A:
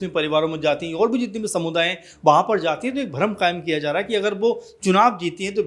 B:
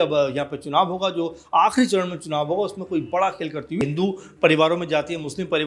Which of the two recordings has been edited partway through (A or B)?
B